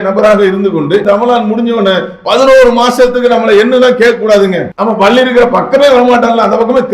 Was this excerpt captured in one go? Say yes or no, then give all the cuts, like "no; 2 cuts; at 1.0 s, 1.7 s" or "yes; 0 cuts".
no; 2 cuts; at 1.0 s, 4.7 s